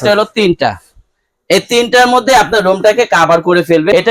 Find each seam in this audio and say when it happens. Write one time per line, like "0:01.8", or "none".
none